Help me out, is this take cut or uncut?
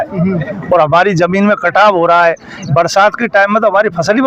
uncut